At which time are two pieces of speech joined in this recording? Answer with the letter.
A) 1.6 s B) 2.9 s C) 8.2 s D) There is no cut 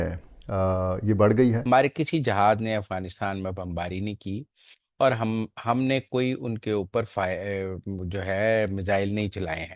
A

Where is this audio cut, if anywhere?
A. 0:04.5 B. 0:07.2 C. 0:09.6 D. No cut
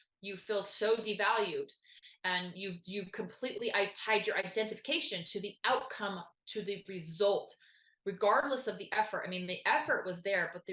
A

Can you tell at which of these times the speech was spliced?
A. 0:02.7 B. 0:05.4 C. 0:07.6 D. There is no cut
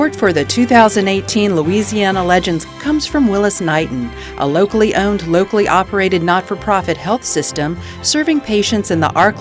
A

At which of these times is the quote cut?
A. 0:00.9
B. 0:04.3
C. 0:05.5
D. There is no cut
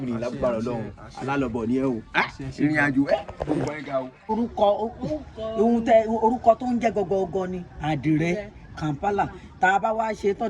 B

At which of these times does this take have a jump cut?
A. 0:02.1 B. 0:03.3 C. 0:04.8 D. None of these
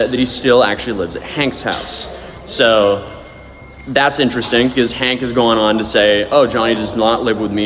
D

